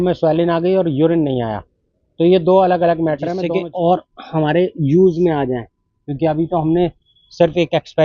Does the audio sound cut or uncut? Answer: cut